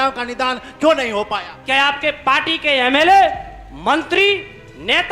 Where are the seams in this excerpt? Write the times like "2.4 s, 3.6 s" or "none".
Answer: 1.5 s